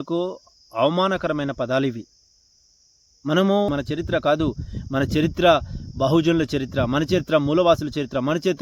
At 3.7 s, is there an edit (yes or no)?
yes